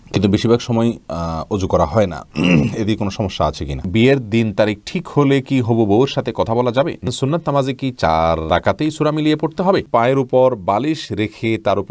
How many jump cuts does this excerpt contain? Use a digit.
4